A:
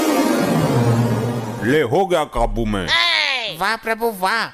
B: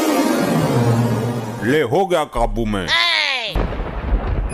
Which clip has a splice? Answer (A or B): B